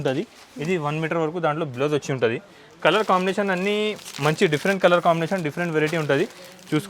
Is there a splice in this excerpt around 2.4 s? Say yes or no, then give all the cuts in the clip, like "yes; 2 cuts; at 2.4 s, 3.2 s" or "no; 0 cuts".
no; 0 cuts